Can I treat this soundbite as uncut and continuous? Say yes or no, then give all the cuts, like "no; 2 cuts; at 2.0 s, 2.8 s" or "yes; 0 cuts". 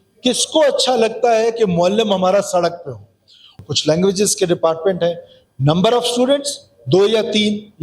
no; 1 cut; at 3.5 s